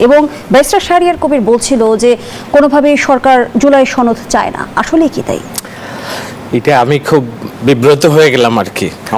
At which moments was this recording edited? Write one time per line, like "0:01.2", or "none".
none